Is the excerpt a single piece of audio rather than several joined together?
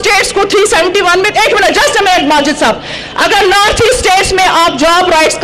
yes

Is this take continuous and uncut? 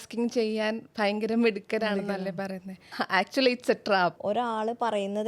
no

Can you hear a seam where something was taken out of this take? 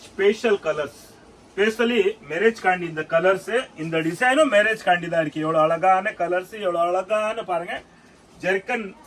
no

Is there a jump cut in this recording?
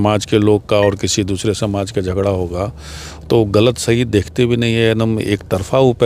no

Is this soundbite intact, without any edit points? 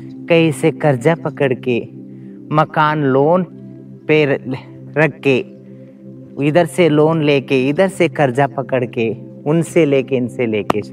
yes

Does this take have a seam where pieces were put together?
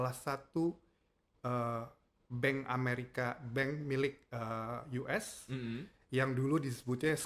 no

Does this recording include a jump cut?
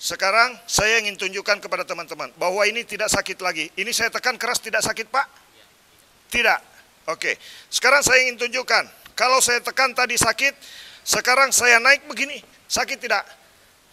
no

